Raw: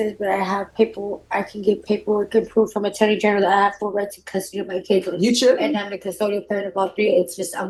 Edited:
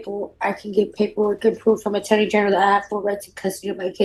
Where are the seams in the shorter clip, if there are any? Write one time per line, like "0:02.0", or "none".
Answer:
none